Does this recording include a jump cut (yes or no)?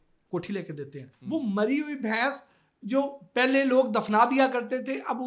yes